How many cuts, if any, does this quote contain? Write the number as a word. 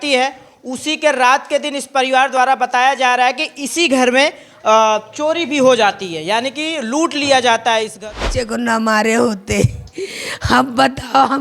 one